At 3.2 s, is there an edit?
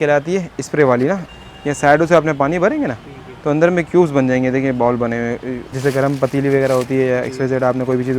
no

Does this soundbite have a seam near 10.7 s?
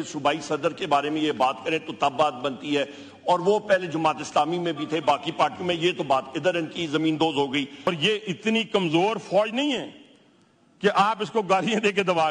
no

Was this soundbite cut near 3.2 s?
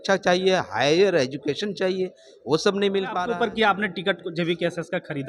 yes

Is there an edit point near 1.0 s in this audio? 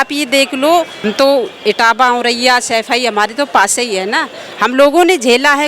yes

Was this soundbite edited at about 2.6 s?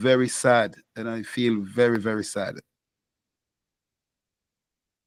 no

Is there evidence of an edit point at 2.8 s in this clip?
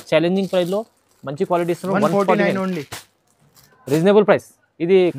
no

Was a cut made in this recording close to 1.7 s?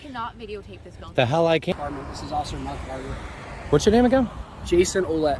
yes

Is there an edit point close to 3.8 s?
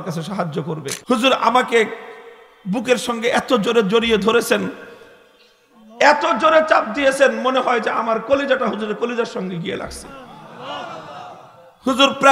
no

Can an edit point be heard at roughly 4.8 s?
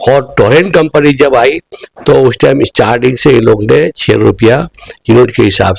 no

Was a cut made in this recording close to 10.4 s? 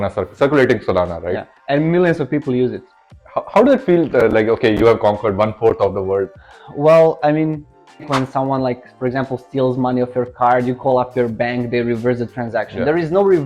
no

